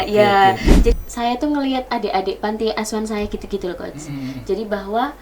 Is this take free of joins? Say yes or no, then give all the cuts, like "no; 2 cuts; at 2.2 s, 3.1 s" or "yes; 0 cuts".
no; 1 cut; at 0.9 s